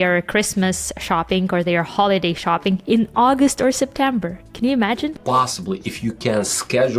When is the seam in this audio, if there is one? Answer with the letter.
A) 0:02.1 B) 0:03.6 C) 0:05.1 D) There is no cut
C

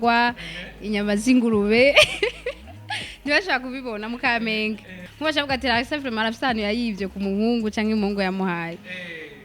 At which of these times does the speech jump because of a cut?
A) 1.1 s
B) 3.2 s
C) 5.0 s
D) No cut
C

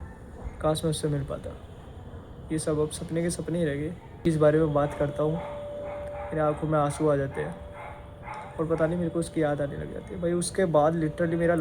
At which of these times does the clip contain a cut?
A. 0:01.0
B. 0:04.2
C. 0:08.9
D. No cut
B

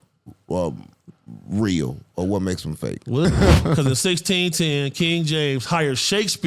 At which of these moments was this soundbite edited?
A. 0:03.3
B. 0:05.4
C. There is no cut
A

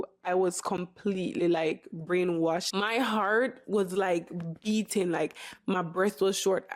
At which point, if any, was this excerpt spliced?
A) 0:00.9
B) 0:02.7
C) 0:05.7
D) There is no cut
B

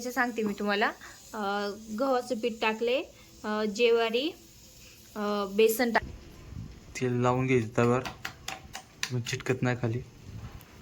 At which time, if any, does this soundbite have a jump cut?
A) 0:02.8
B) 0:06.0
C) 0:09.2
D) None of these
B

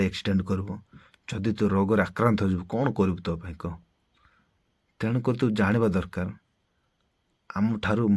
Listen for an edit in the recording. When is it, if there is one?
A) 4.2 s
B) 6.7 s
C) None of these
A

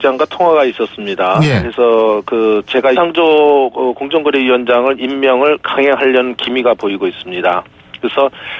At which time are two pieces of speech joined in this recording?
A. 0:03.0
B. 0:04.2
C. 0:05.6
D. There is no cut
D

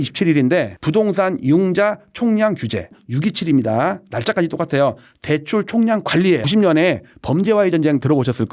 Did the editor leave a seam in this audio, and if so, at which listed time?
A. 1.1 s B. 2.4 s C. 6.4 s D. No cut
D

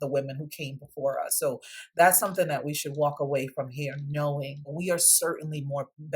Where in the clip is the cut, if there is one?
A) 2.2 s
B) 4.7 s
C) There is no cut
B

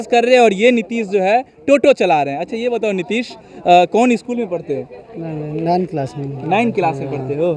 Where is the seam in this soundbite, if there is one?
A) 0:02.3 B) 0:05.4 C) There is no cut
C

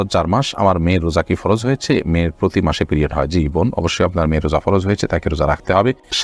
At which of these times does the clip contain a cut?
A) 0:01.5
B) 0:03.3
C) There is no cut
C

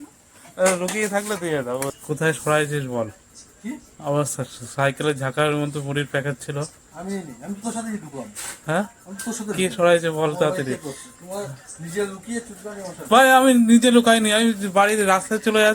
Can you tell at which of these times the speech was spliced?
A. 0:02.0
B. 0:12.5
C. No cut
A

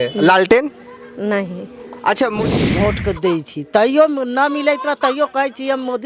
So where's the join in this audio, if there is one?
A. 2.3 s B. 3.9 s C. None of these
A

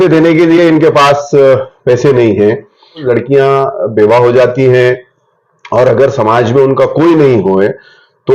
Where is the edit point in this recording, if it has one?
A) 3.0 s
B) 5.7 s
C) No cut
A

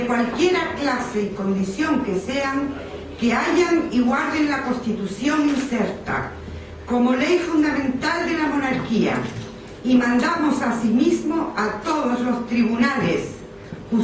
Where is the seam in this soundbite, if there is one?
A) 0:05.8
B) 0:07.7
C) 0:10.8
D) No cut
A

